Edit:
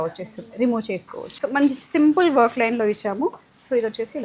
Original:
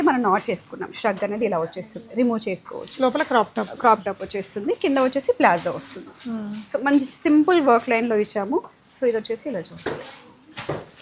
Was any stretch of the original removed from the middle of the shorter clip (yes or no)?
yes